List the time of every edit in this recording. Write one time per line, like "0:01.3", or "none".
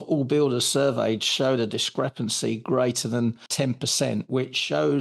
0:03.4